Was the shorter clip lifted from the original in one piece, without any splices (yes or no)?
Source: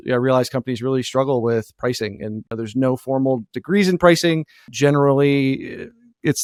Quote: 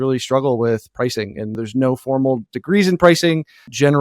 no